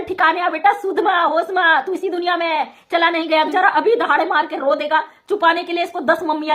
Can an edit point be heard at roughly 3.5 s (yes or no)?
yes